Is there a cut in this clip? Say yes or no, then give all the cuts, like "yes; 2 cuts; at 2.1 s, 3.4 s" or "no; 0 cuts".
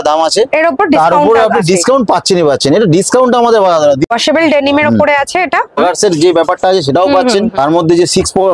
yes; 2 cuts; at 4.1 s, 5.7 s